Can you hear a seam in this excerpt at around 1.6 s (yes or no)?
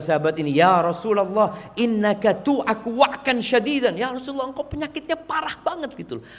no